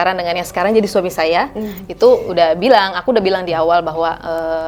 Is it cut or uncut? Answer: uncut